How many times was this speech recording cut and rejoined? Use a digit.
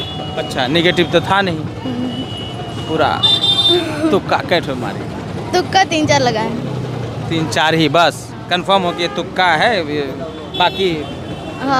0